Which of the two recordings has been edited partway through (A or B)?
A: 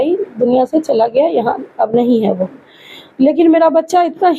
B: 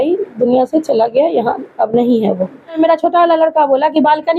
B